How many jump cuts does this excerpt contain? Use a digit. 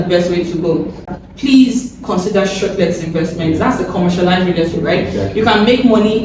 1